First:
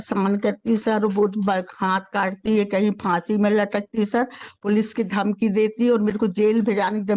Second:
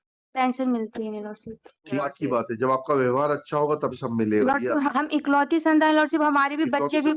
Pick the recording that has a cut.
second; 2 cuts; at 2.0 s, 4.9 s

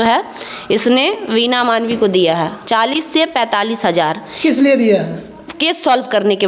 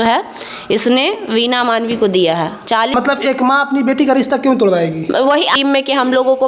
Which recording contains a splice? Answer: second; 2 cuts; at 2.9 s, 5.5 s

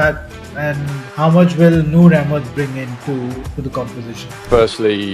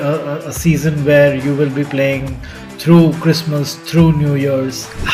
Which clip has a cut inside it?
first; 1 cut; at 1.0 s

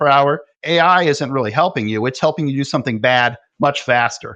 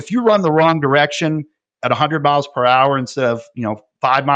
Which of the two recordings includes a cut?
first; 1 cut; at 3.4 s

